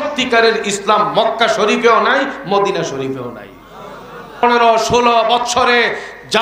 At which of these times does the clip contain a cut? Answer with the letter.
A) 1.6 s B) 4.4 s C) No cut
B